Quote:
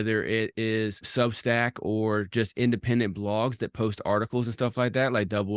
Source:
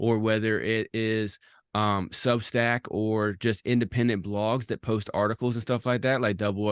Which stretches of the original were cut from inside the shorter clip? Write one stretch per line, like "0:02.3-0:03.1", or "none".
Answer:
0:01.4-0:02.1